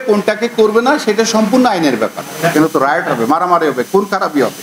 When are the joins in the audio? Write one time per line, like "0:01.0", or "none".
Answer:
0:02.5